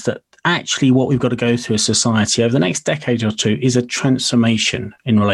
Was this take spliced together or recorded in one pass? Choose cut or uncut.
uncut